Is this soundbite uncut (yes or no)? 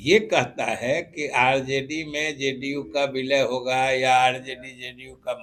yes